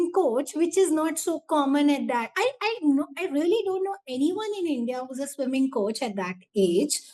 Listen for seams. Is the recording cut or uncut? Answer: uncut